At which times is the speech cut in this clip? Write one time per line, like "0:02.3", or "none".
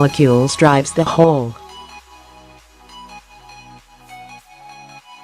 0:02.1